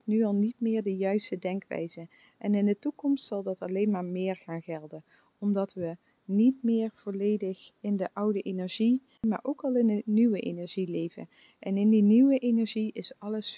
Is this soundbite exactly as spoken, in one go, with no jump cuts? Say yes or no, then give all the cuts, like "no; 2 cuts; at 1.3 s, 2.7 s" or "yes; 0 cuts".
no; 2 cuts; at 7.7 s, 9.2 s